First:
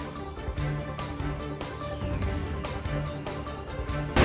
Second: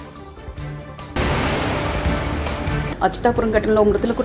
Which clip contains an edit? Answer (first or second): second